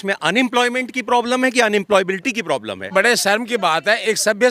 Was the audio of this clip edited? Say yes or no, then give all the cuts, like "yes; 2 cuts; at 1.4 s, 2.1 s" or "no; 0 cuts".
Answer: yes; 1 cut; at 2.9 s